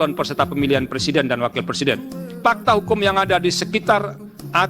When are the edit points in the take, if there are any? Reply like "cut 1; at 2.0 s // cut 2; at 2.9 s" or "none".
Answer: cut 1; at 2.4 s